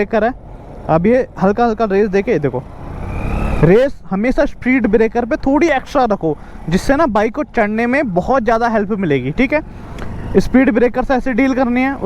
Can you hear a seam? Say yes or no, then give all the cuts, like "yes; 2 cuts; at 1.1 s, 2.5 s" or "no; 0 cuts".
no; 0 cuts